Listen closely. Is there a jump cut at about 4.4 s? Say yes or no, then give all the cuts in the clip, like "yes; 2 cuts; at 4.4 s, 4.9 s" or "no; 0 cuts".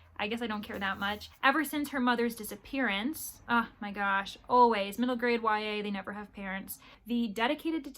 no; 2 cuts; at 1.2 s, 6.9 s